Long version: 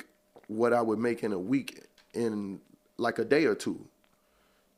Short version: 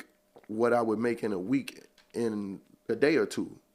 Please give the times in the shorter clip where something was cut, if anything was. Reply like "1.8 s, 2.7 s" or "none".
2.8 s